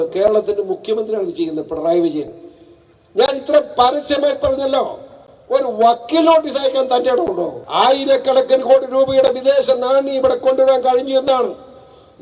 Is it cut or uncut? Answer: cut